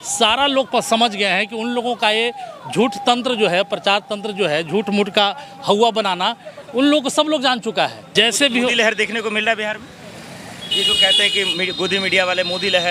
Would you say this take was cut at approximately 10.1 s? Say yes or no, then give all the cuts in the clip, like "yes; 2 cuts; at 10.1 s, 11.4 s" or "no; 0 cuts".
no; 1 cut; at 8.0 s